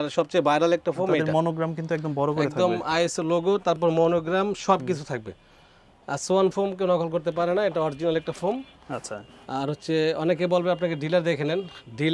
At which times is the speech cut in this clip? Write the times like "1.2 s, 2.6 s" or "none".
none

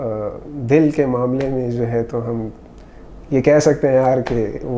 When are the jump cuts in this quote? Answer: none

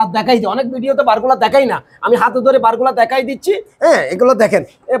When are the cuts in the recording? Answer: none

